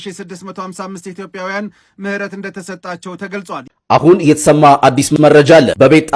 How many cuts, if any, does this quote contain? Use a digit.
1